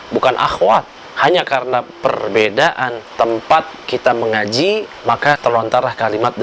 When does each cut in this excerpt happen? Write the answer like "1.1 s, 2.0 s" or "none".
1.0 s, 3.0 s, 3.8 s